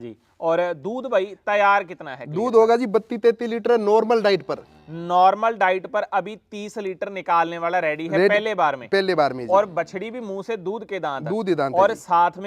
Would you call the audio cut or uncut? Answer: uncut